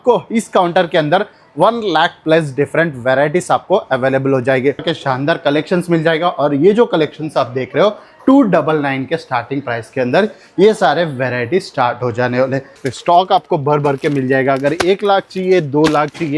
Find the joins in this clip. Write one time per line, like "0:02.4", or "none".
0:04.8
0:12.7